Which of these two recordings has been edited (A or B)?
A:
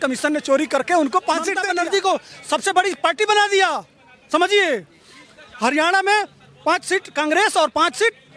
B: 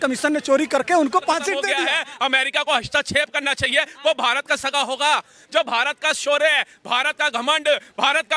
B